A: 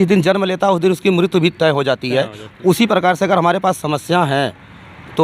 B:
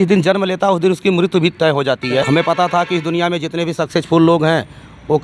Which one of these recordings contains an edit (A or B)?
B